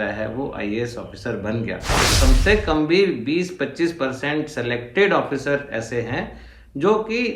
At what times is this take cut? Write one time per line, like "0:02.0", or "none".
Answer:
0:02.1